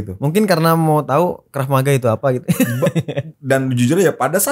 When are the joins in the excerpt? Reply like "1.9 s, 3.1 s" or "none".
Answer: 3.3 s